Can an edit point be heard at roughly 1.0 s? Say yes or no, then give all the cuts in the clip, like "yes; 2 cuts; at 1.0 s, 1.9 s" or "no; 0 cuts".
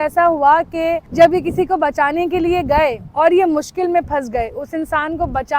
yes; 1 cut; at 1.0 s